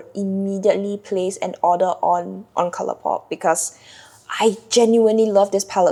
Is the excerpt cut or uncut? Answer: uncut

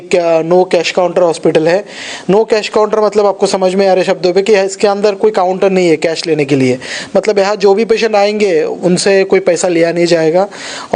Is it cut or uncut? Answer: uncut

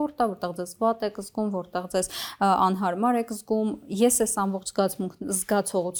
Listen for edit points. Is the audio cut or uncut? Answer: uncut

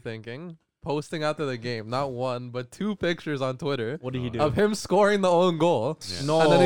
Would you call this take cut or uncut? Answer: uncut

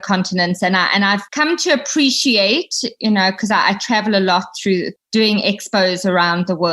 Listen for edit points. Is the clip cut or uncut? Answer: cut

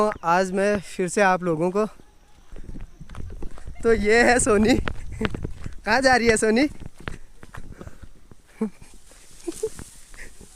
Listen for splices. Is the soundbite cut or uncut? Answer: cut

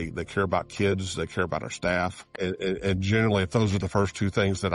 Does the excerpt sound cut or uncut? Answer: cut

